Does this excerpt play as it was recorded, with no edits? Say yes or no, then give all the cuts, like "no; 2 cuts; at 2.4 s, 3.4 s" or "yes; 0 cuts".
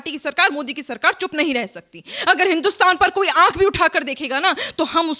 yes; 0 cuts